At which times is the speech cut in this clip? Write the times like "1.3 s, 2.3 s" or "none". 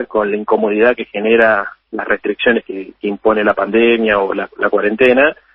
none

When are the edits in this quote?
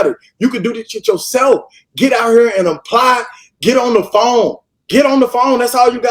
none

